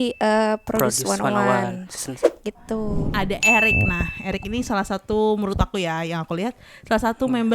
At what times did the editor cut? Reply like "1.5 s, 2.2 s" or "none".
3.1 s